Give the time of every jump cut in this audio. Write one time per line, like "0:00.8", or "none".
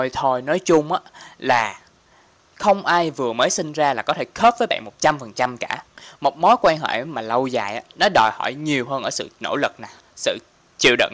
none